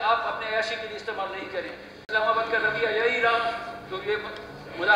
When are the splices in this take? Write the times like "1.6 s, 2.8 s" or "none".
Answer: 2.1 s